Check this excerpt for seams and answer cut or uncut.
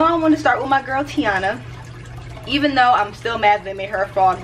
uncut